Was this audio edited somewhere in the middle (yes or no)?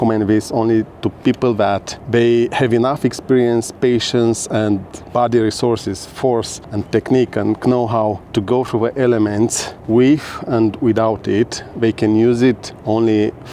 no